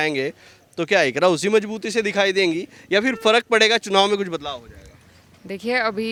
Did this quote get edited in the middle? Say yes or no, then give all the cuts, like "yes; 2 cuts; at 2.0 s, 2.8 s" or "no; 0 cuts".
no; 0 cuts